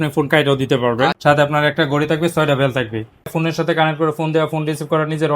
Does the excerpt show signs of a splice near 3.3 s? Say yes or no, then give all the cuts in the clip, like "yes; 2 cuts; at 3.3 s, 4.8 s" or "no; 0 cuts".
yes; 2 cuts; at 1.2 s, 3.3 s